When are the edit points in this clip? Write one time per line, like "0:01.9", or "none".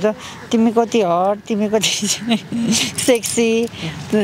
none